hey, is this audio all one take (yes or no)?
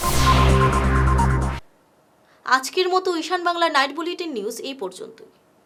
yes